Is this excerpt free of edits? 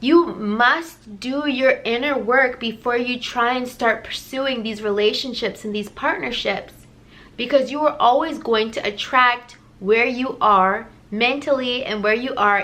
no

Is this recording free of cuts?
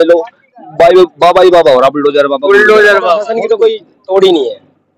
no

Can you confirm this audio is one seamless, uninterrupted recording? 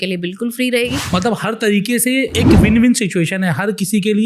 no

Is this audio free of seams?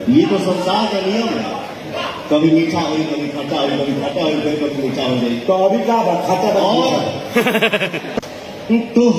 no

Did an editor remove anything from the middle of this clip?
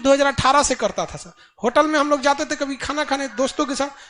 no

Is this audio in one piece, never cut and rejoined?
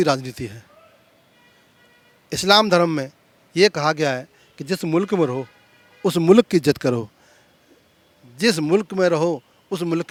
yes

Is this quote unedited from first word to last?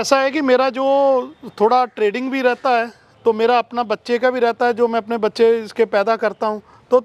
yes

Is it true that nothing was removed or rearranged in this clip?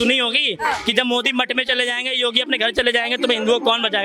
yes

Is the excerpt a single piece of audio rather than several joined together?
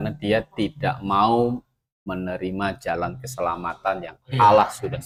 yes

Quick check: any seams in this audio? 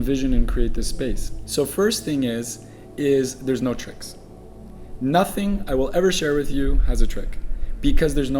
yes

